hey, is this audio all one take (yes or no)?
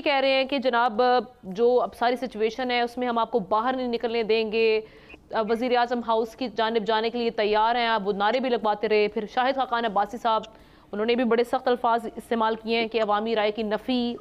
yes